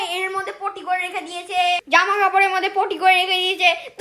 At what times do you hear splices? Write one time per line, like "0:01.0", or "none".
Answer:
0:01.8